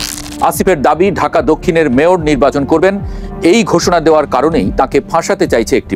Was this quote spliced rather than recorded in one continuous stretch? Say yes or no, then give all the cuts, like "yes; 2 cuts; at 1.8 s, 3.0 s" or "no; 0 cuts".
no; 0 cuts